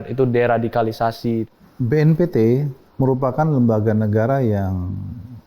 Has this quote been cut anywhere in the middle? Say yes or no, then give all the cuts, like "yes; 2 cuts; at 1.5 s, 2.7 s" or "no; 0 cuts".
yes; 2 cuts; at 1.5 s, 2.8 s